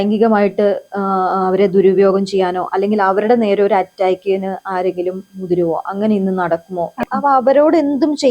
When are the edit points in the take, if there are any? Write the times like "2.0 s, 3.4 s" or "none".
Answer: 7.0 s

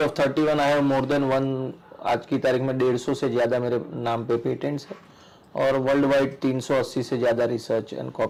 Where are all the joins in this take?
none

